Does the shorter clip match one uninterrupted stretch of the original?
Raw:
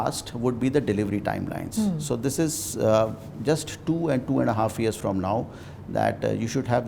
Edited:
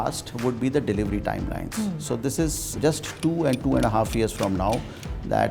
no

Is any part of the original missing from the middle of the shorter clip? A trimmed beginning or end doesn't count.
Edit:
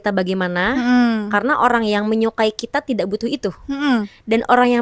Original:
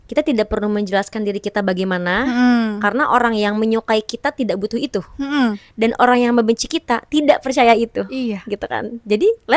no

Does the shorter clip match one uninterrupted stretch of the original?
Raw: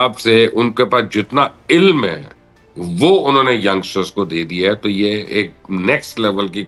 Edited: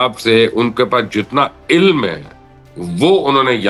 yes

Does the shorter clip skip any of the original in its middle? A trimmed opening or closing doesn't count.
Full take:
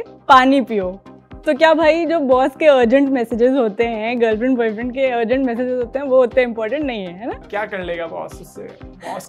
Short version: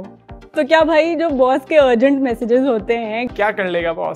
yes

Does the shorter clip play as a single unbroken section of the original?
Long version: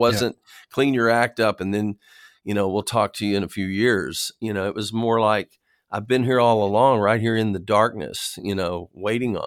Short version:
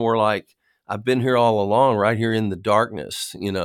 yes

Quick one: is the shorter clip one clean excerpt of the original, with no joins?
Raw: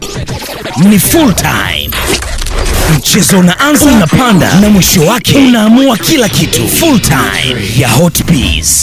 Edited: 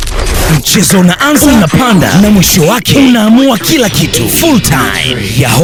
yes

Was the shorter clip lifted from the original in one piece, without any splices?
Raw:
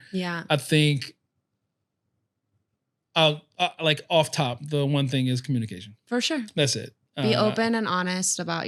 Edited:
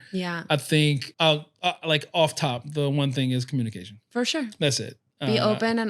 no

